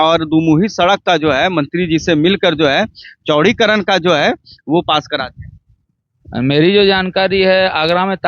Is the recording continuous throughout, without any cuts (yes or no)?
yes